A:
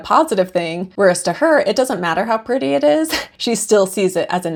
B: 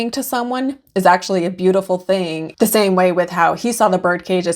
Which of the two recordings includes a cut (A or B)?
B